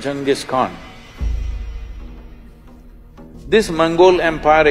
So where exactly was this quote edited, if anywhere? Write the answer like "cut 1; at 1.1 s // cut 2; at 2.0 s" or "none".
cut 1; at 3.3 s